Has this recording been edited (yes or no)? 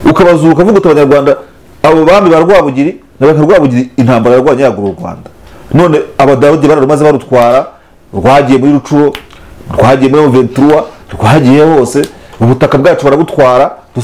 no